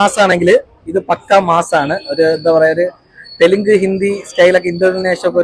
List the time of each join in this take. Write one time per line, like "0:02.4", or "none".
none